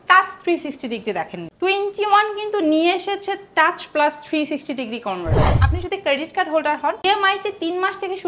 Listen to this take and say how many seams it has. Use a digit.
2